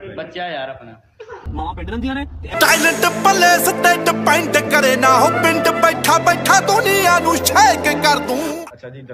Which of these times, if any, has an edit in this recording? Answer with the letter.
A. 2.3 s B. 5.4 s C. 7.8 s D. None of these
D